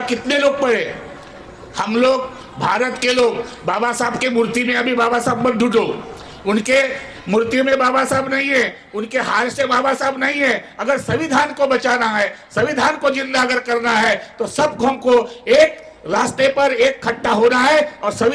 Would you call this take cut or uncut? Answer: uncut